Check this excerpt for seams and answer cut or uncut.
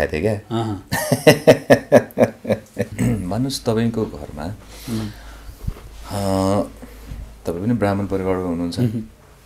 cut